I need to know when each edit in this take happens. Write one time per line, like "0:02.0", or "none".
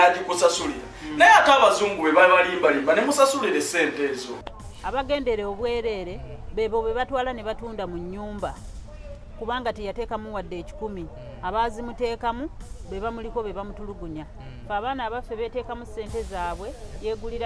none